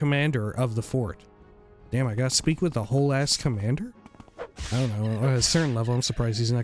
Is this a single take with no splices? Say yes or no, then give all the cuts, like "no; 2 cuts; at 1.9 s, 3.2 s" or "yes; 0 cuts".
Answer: no; 1 cut; at 4.5 s